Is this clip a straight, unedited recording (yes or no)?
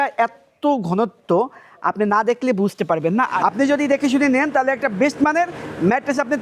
no